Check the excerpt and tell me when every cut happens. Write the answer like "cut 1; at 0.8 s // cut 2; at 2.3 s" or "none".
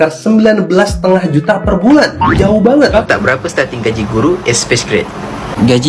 cut 1; at 3.0 s